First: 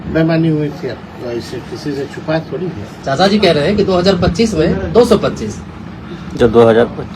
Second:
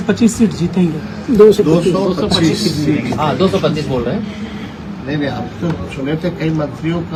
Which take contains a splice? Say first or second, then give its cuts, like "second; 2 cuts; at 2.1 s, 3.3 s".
first; 1 cut; at 2.9 s